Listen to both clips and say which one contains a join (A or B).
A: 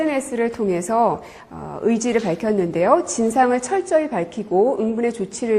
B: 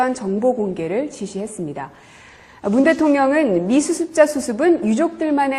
B